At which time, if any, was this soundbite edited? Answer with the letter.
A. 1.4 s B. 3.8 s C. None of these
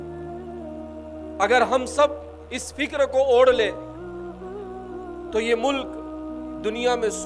A